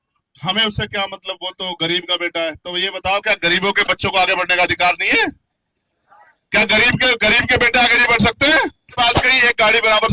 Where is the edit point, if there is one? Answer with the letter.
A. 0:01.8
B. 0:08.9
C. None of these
B